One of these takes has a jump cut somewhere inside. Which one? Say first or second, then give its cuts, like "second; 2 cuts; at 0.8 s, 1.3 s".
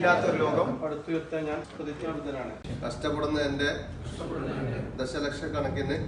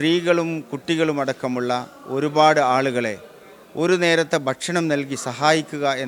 first; 2 cuts; at 1.7 s, 2.6 s